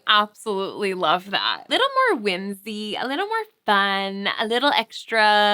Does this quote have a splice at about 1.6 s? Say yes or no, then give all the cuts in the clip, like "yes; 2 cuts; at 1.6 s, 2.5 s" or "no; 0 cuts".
yes; 1 cut; at 1.6 s